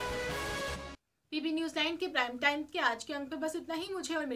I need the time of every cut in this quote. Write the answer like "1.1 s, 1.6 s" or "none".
none